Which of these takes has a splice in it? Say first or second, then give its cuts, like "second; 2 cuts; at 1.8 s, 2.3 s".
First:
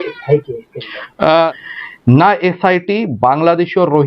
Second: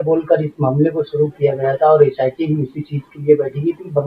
first; 1 cut; at 1.6 s